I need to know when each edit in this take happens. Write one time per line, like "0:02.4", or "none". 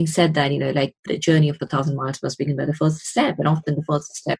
0:01.0